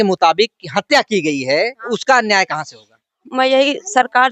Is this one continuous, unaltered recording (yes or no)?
no